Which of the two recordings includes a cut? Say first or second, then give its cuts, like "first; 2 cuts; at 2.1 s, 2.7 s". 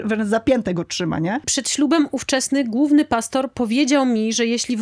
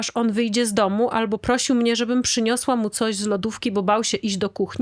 first; 1 cut; at 1.6 s